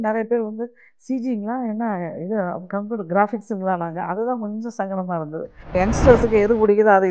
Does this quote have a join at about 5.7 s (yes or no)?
yes